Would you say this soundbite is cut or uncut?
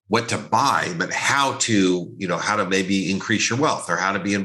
uncut